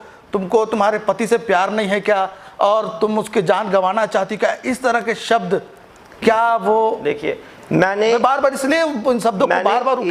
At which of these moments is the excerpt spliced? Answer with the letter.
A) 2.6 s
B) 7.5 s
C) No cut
C